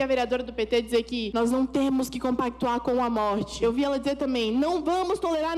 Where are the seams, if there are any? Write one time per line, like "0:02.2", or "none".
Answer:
0:01.2
0:03.5